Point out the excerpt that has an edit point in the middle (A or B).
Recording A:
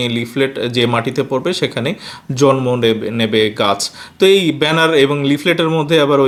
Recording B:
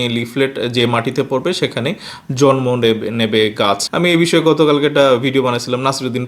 B